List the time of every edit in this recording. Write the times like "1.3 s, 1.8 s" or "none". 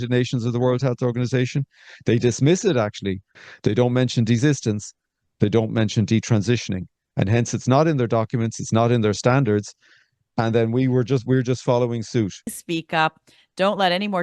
12.4 s